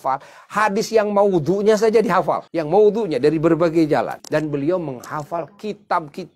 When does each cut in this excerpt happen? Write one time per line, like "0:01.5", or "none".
0:02.5
0:04.2